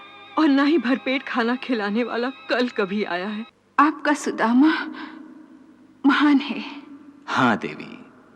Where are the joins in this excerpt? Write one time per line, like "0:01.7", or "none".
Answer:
0:03.6